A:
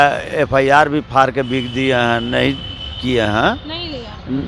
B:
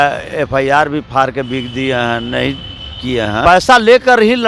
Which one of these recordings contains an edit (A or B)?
B